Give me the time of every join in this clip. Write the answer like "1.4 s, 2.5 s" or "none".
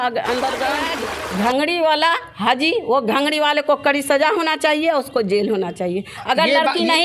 0.9 s